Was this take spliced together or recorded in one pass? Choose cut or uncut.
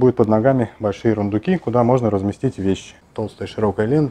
cut